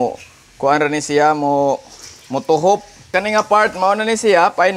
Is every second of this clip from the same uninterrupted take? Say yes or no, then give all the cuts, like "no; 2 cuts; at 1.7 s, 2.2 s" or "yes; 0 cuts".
no; 1 cut; at 3.1 s